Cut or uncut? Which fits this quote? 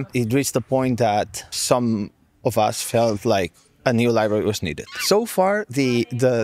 cut